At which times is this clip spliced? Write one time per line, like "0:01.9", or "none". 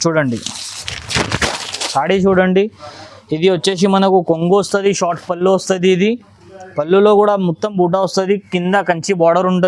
none